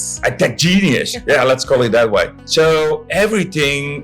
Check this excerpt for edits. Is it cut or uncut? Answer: cut